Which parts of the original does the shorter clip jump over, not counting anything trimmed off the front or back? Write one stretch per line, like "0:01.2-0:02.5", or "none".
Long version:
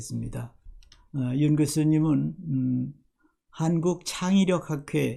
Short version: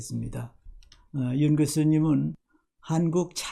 0:02.4-0:03.1